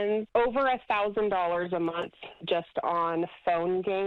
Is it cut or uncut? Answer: uncut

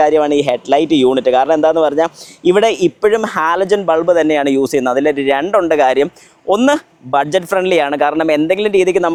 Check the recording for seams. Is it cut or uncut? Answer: uncut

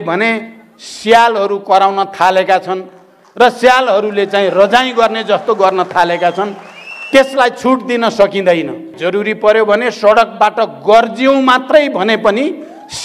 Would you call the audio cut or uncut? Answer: cut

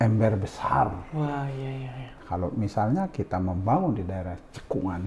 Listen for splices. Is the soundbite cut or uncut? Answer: cut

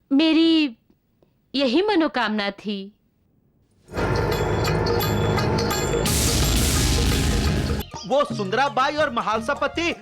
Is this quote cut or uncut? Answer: cut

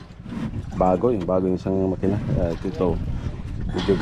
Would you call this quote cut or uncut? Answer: uncut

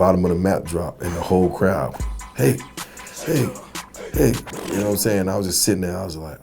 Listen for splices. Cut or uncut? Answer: uncut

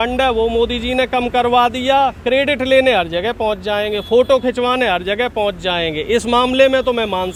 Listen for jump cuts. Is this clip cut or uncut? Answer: uncut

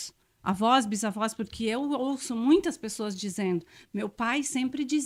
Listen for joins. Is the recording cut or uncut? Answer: uncut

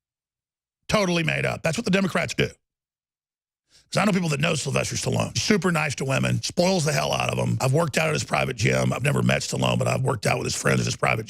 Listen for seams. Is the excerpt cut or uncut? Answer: cut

